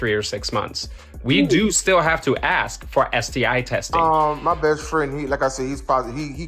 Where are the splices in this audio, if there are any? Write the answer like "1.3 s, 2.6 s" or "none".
3.9 s